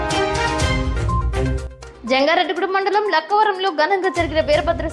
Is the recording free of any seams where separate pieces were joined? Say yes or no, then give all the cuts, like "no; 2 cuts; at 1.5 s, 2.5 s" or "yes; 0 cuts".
no; 1 cut; at 1.5 s